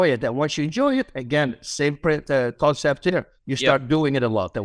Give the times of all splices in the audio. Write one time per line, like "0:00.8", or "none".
none